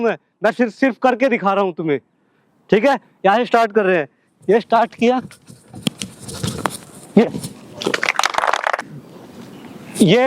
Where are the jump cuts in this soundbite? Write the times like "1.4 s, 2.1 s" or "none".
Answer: 8.8 s